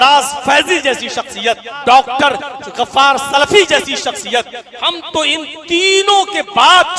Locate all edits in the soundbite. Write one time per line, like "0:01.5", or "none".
0:01.7